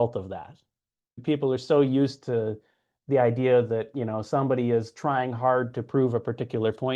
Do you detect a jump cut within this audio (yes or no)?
no